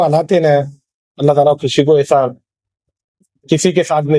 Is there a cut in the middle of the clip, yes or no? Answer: no